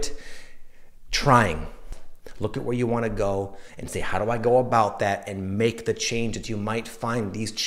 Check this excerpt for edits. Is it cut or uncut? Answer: cut